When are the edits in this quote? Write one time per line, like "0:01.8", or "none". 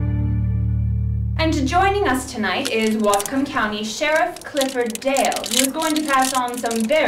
0:01.3